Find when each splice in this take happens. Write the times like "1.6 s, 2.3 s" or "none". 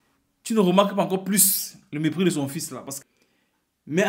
2.9 s

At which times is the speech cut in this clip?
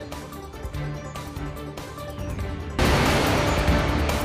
none

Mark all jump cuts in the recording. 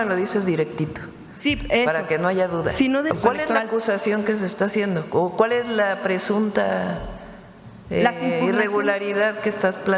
3.1 s

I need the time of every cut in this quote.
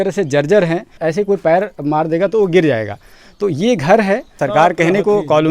0.9 s, 4.4 s

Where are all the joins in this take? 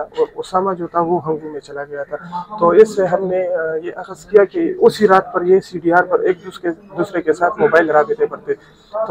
none

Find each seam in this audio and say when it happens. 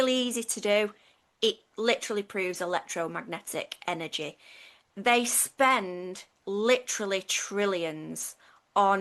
4.9 s

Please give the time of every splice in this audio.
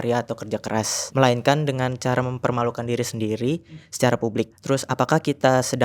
1.0 s, 4.6 s

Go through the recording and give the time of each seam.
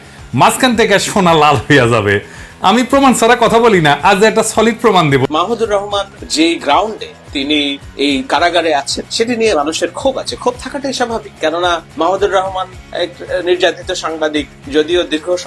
5.2 s, 6.2 s, 7.8 s, 11.9 s, 14.6 s

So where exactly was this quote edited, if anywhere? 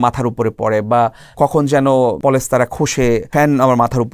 1.3 s, 2.2 s, 3.3 s

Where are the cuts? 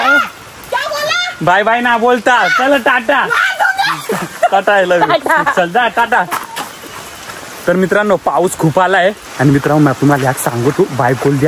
none

